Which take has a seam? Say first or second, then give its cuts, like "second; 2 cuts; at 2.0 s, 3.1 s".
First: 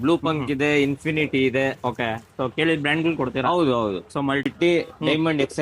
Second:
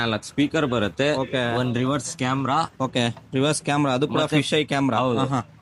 first; 1 cut; at 4.4 s